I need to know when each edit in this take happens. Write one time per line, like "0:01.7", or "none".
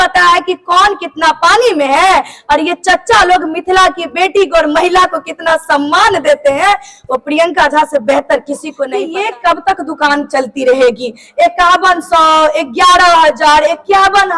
0:09.0